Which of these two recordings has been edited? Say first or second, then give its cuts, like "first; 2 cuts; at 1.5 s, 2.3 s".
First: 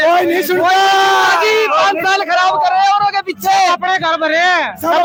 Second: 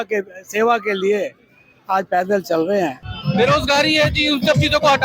second; 1 cut; at 3.1 s